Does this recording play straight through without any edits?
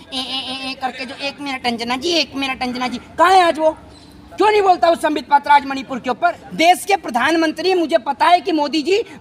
no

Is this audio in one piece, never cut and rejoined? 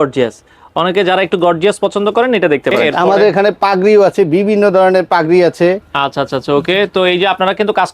no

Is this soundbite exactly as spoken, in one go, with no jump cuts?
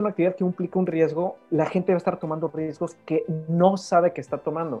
yes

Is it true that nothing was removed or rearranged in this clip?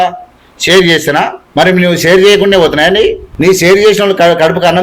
no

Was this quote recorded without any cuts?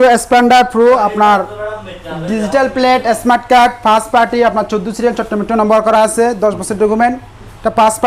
yes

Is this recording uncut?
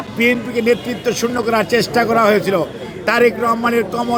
yes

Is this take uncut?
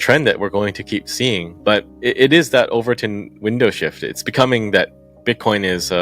no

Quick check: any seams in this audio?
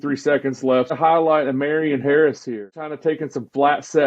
yes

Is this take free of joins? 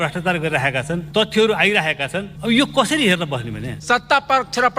no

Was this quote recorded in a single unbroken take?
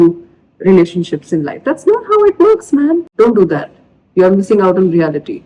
no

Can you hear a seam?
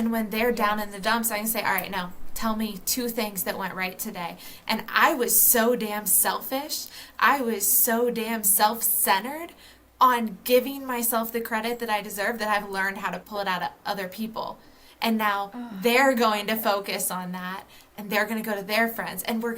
yes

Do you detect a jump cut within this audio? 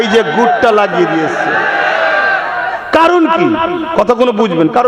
no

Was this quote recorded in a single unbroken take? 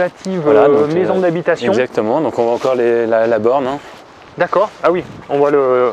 yes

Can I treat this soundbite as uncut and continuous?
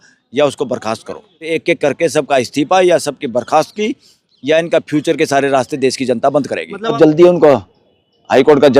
no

